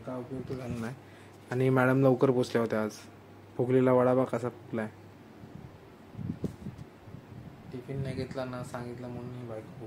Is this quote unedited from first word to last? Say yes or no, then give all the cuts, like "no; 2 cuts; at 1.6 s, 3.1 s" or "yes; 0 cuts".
no; 1 cut; at 5.1 s